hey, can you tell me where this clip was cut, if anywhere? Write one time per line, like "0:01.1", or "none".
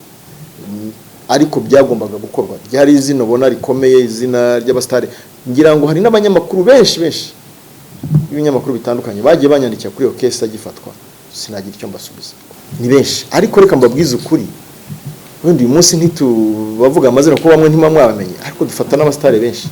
0:12.4